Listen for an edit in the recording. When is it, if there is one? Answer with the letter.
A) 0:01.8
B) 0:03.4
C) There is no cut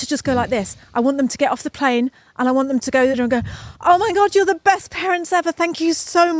B